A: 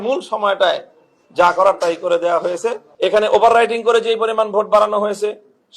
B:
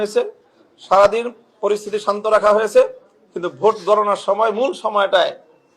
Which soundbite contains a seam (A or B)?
A